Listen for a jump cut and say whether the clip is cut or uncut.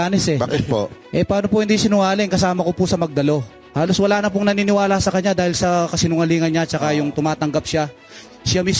cut